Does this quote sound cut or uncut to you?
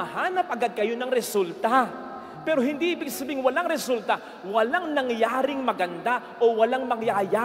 uncut